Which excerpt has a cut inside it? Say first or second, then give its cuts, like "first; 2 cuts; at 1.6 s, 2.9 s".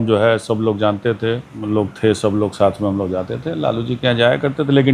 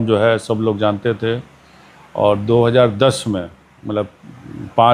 first; 1 cut; at 1.5 s